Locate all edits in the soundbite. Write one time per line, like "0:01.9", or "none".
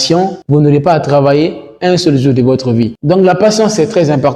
none